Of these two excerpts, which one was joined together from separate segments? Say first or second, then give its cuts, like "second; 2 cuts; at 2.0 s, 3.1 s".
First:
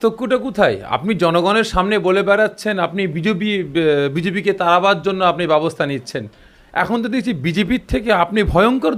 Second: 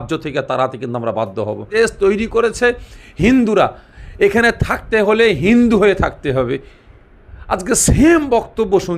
second; 1 cut; at 1.7 s